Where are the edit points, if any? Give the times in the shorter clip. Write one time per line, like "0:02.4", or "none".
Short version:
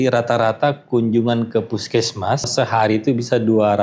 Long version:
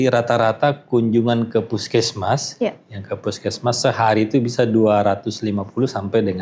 0:02.5